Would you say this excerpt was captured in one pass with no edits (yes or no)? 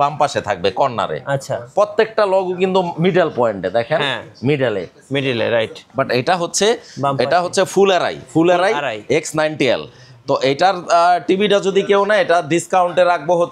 yes